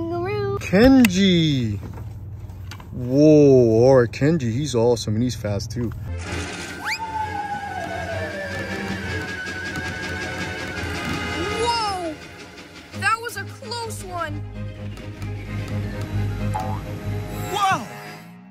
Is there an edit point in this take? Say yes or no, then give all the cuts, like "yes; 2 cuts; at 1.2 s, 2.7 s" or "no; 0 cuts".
yes; 1 cut; at 6.2 s